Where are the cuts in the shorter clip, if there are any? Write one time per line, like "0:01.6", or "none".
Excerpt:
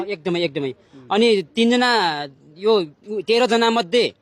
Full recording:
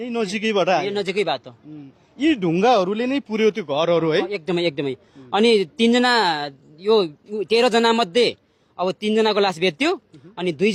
none